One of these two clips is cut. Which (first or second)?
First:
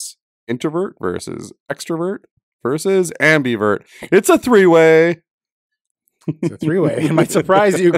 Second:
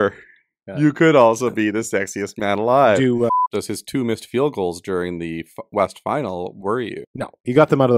second